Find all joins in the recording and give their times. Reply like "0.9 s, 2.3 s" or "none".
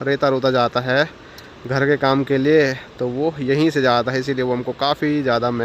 none